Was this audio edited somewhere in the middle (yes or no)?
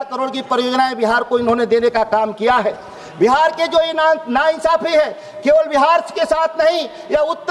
no